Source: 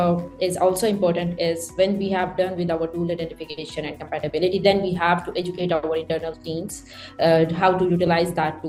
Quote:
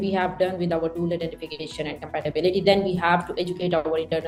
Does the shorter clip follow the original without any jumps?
yes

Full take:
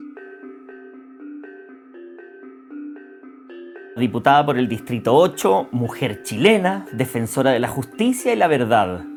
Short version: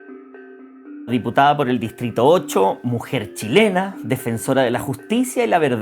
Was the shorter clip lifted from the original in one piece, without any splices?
no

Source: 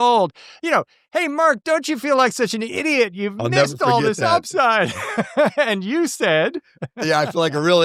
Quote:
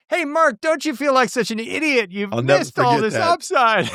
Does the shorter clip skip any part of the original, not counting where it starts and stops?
no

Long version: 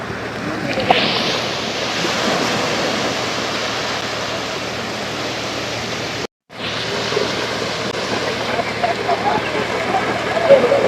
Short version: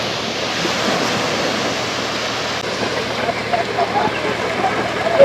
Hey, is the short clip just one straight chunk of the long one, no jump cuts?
no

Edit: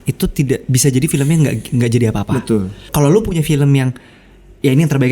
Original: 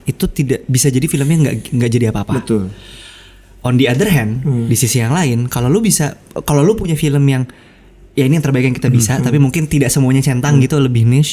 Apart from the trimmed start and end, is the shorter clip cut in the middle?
yes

